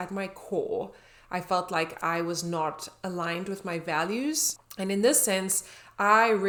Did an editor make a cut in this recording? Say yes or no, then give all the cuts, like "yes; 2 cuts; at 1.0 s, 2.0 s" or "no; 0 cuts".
no; 0 cuts